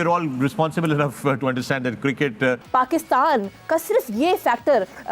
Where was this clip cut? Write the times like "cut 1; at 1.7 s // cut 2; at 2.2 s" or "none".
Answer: cut 1; at 2.6 s